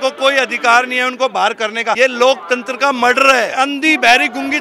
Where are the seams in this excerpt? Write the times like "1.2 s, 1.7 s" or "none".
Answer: 2.0 s, 3.5 s